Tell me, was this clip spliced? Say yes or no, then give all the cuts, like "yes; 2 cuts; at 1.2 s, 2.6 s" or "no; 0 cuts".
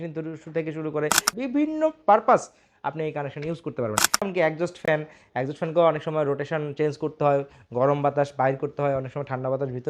yes; 2 cuts; at 1.3 s, 4.3 s